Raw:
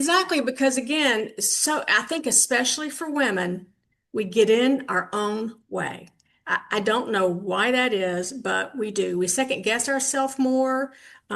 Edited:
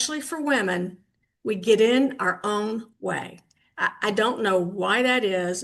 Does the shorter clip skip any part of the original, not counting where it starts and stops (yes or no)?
no